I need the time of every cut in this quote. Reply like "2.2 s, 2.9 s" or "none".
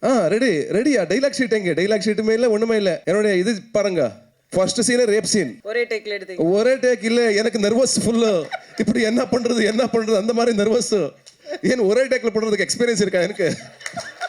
3.0 s, 5.6 s